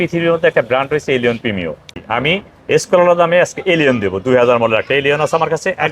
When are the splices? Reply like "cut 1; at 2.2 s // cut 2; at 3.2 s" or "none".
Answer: cut 1; at 1.9 s